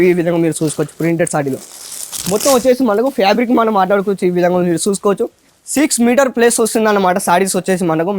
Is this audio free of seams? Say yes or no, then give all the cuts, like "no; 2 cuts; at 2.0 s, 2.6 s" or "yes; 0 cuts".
yes; 0 cuts